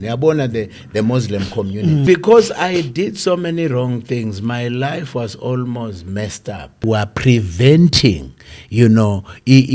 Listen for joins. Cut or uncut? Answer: cut